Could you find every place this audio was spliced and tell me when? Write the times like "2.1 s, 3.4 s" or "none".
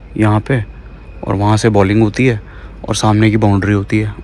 none